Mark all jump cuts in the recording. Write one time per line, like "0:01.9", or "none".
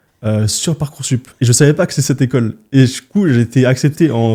none

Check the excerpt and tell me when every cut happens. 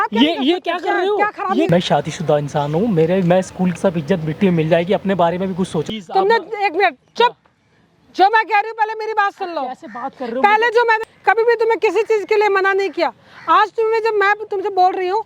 0:01.7
0:03.7
0:05.9
0:11.1

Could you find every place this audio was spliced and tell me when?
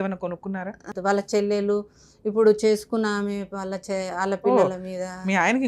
0:00.9

